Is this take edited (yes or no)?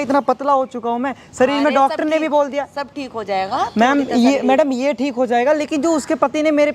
no